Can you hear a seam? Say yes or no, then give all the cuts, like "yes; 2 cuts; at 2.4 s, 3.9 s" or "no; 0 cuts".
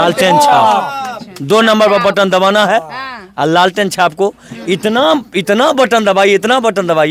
no; 0 cuts